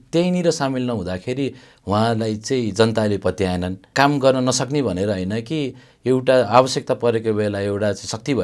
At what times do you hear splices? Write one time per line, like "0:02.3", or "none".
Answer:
0:03.8